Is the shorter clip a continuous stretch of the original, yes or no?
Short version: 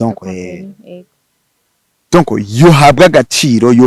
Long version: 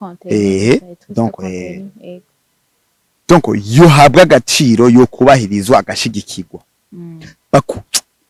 yes